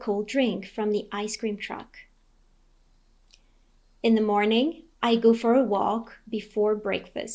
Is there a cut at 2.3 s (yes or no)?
yes